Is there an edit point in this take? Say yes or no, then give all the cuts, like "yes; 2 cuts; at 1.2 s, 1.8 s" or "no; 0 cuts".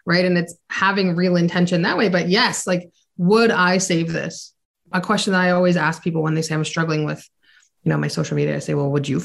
yes; 1 cut; at 4.9 s